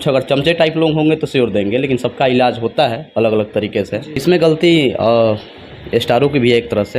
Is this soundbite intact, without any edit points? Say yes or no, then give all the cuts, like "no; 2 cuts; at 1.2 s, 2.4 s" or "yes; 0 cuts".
no; 1 cut; at 4.1 s